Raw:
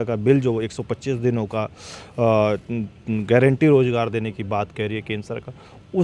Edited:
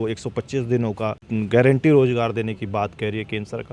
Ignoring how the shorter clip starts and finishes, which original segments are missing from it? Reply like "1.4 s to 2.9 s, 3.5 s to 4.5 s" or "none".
1.7 s to 3.0 s